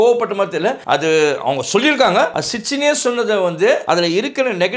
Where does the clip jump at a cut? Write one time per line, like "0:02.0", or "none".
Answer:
0:00.8
0:02.4
0:03.8